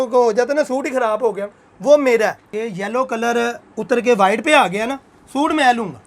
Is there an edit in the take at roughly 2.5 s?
yes; 1 cut; at 2.5 s

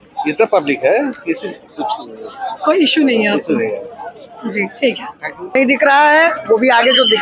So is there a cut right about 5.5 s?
yes; 1 cut; at 5.5 s

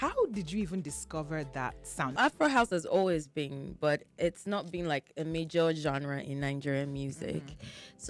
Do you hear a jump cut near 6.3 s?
no; 1 cut; at 2.2 s

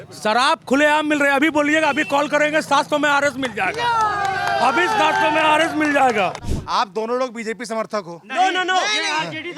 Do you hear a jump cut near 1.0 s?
no; 1 cut; at 6.5 s

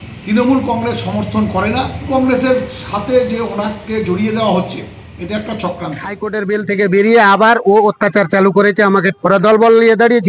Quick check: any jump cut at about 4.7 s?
no; 3 cuts; at 2.1 s, 6.3 s, 9.1 s

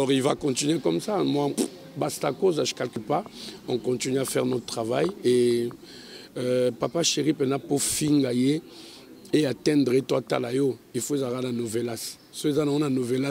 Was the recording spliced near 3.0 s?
yes; 1 cut; at 3.0 s

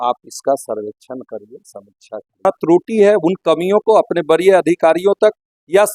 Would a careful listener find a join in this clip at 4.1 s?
no; 1 cut; at 2.4 s

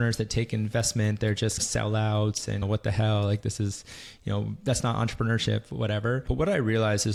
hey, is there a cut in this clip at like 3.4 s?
no; 0 cuts

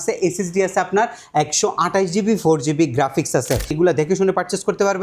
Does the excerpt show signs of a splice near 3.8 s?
yes; 1 cut; at 3.8 s

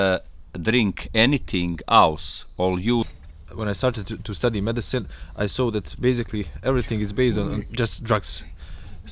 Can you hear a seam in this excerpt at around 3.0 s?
yes; 1 cut; at 3.0 s

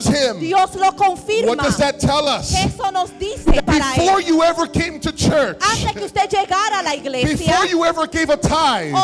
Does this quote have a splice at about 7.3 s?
no; 1 cut; at 3.6 s

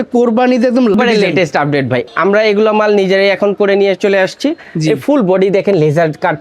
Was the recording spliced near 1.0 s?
yes; 2 cuts; at 1.0 s, 2.0 s

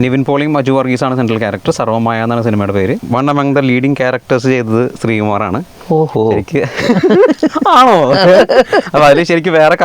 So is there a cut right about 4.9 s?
no; 1 cut; at 3.0 s

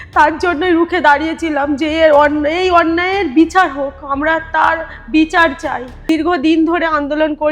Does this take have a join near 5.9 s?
yes; 1 cut; at 5.9 s

